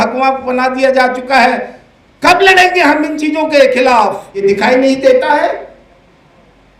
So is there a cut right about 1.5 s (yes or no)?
no